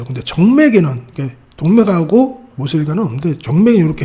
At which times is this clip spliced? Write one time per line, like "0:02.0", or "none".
none